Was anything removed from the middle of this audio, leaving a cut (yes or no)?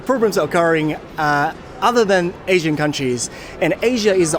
no